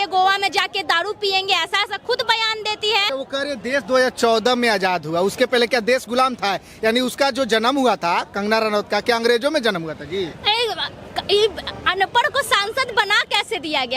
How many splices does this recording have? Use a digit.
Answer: 0